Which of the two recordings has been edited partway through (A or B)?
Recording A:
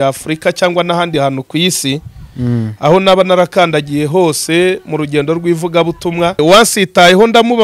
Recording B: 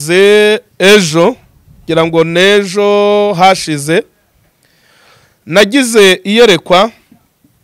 A